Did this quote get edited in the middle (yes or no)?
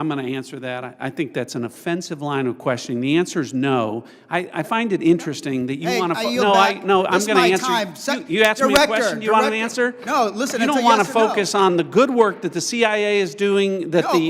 no